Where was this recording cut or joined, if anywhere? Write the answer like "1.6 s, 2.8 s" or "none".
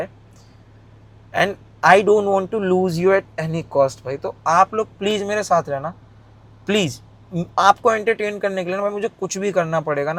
none